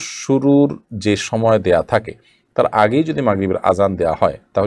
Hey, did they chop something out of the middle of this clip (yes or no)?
no